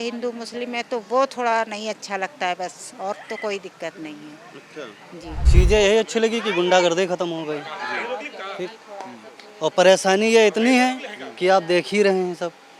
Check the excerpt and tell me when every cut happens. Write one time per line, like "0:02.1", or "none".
0:05.4